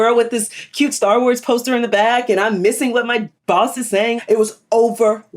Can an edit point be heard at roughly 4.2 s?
yes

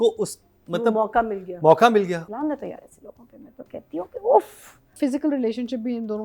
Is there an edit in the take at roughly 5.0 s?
yes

